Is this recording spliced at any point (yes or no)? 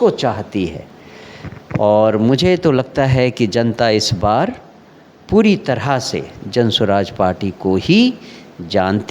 no